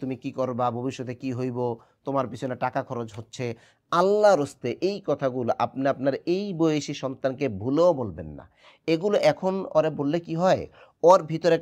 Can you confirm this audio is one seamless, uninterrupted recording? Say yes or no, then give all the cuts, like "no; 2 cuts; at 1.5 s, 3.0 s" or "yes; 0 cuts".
yes; 0 cuts